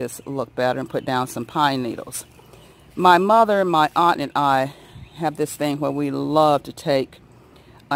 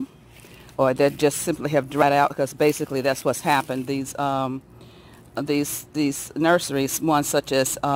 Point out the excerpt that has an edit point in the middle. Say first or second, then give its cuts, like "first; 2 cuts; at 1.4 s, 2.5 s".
second; 1 cut; at 2.0 s